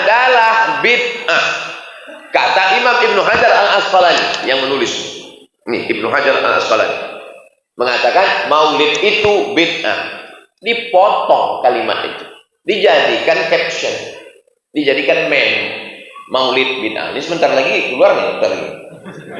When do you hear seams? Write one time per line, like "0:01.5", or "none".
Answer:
none